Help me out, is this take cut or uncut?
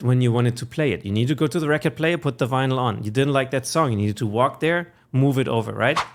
uncut